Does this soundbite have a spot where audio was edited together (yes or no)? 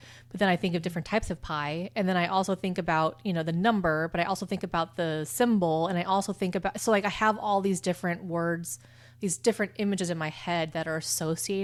no